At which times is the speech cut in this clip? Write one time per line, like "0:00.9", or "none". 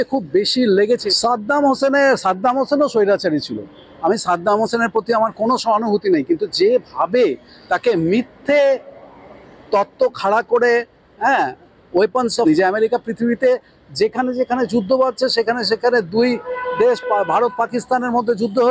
0:01.1
0:12.4